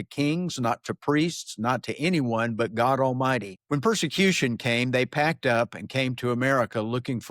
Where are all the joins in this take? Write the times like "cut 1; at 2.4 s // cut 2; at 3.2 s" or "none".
cut 1; at 3.5 s